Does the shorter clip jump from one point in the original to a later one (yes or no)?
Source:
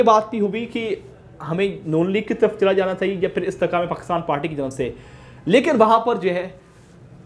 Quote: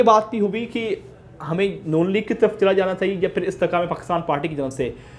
no